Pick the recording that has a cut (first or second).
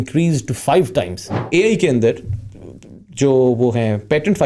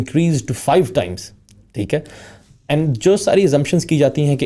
first